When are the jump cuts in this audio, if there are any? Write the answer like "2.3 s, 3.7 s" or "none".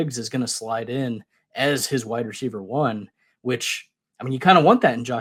none